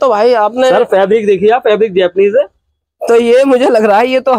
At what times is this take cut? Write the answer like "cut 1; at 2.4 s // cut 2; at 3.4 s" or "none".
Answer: none